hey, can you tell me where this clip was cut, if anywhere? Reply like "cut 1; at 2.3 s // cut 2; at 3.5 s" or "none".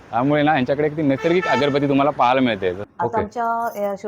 cut 1; at 2.8 s